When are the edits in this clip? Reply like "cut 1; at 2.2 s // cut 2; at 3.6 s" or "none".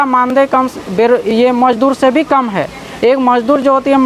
none

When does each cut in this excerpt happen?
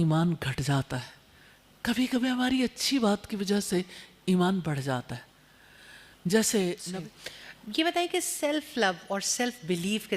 cut 1; at 6.8 s

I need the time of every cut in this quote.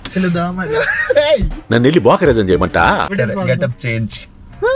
cut 1; at 3.1 s

